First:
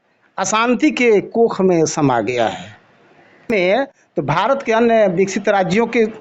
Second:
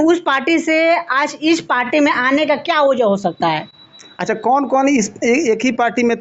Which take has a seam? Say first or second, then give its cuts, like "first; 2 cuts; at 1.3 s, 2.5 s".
first; 1 cut; at 3.5 s